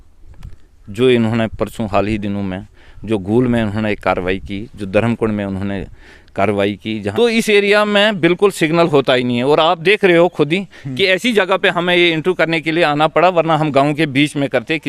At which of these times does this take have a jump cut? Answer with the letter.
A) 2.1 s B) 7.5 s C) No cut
B